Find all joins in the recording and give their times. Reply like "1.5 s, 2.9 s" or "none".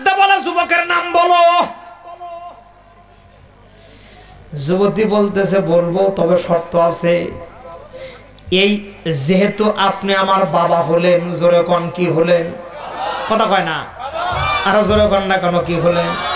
none